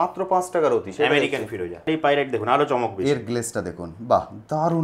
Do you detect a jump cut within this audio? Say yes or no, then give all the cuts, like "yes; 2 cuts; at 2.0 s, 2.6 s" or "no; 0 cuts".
yes; 1 cut; at 1.9 s